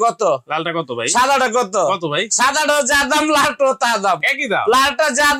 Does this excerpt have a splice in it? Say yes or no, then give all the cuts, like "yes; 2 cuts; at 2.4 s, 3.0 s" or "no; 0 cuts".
no; 0 cuts